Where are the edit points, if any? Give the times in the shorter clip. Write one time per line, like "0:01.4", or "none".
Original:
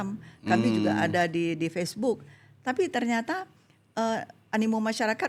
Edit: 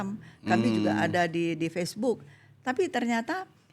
none